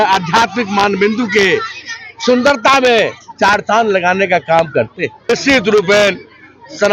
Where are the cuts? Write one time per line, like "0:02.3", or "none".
0:05.3